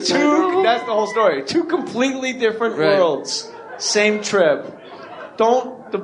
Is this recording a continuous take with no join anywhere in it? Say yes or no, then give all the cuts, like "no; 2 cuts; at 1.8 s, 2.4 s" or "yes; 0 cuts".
no; 1 cut; at 2.3 s